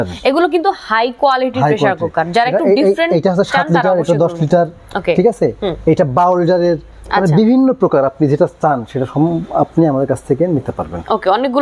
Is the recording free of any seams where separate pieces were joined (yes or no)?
yes